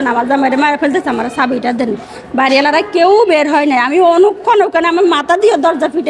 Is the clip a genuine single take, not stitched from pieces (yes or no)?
yes